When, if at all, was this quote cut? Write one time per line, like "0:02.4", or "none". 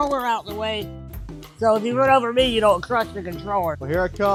none